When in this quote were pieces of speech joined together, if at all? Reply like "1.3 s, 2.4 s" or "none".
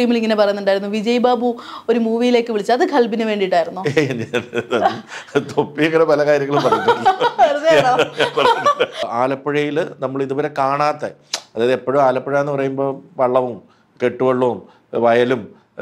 9.0 s